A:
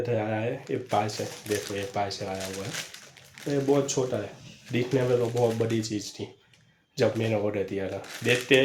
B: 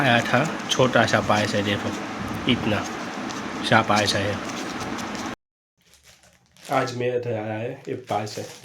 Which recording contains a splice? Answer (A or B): B